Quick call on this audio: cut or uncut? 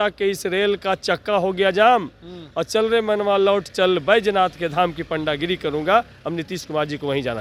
uncut